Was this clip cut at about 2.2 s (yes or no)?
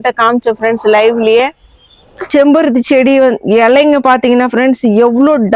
yes